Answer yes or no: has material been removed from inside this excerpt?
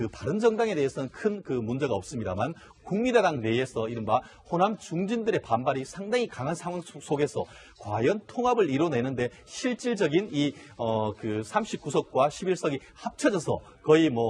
no